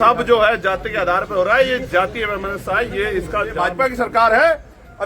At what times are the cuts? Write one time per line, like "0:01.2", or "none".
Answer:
0:03.5